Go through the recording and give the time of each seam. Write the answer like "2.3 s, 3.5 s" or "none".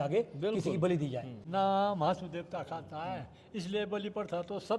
1.3 s